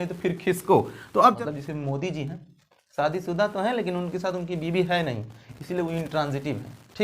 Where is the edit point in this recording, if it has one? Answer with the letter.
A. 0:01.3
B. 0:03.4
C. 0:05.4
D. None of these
A